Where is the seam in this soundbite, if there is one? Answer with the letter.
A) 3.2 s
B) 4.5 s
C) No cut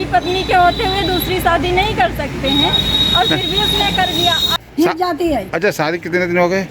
B